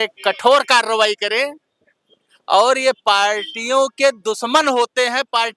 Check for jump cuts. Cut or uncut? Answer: uncut